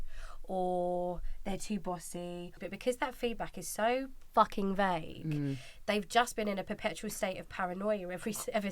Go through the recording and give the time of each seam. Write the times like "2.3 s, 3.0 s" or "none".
2.6 s